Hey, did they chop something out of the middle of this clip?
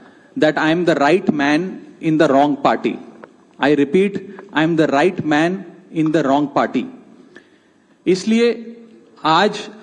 no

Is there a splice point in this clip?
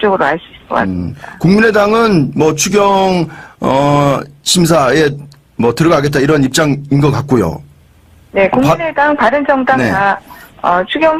no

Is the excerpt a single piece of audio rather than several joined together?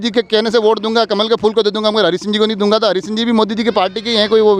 yes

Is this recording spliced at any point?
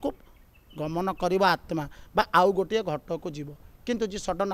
no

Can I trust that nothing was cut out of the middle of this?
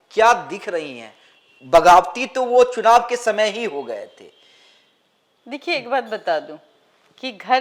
yes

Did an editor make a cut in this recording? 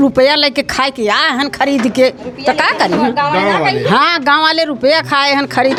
no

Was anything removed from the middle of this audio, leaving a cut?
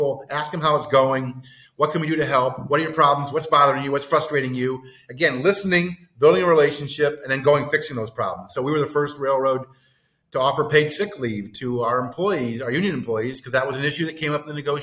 no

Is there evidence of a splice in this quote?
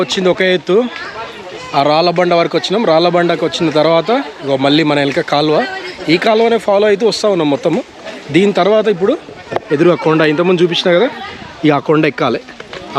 no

